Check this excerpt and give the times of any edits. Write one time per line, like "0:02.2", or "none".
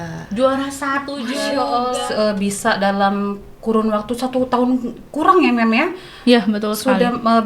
0:02.0

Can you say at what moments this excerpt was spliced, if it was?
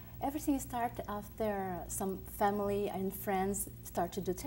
0:01.9

